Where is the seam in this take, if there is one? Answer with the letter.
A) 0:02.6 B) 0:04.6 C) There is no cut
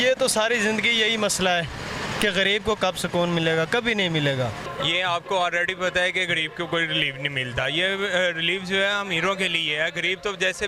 B